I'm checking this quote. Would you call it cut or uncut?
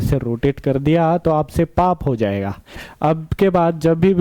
cut